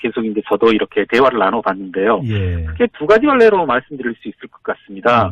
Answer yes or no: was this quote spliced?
yes